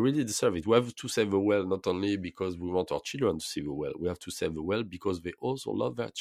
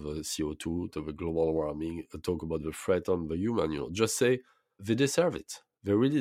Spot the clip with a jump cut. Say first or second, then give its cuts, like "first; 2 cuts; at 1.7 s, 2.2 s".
second; 2 cuts; at 0.9 s, 4.8 s